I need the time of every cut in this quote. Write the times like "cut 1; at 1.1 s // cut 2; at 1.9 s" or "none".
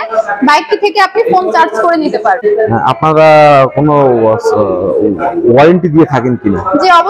cut 1; at 2.4 s